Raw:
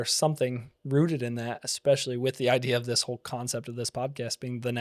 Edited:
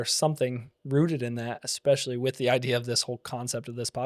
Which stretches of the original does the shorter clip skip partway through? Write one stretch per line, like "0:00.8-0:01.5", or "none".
none